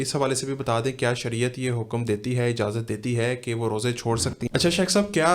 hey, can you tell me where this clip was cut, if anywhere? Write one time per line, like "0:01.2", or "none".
0:04.4